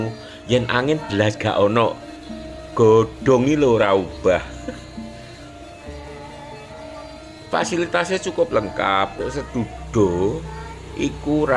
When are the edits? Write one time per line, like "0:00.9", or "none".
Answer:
0:09.2